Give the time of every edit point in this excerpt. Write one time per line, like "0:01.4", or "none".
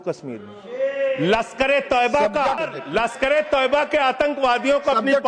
0:02.7